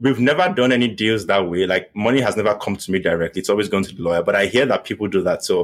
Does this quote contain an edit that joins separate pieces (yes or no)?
yes